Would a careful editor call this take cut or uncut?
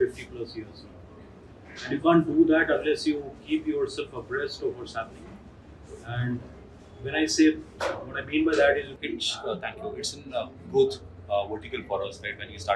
cut